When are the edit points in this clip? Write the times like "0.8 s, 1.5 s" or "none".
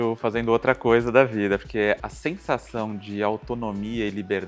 2.0 s